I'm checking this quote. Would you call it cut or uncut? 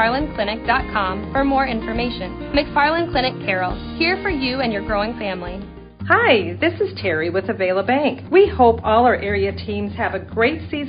cut